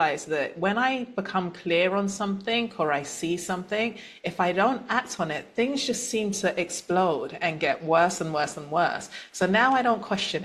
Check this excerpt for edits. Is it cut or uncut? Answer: uncut